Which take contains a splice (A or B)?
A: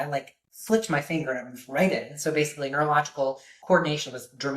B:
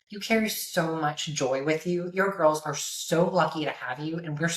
A